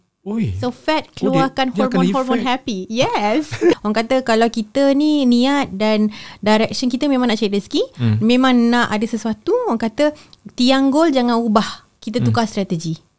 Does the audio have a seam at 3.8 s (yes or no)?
yes